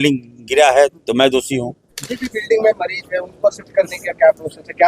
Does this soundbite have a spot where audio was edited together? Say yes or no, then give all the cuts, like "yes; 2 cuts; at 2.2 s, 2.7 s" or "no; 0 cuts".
yes; 1 cut; at 2.2 s